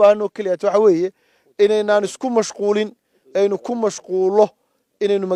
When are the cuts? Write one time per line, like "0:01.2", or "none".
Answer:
none

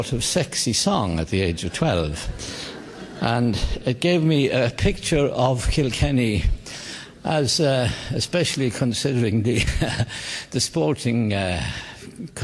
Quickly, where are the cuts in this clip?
0:07.8

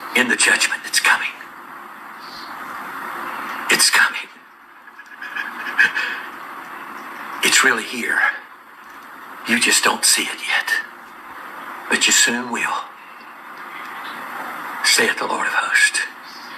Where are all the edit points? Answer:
none

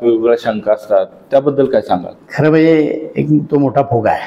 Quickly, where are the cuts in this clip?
0:02.2

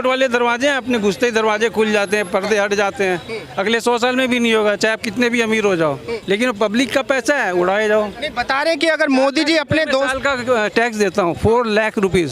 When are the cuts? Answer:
0:06.1

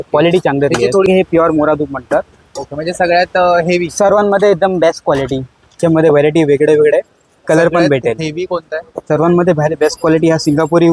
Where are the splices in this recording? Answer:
0:01.1
0:05.8

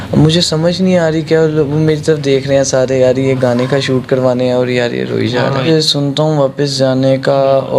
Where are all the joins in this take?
0:05.6

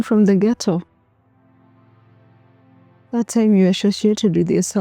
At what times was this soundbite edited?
0:01.4
0:03.1

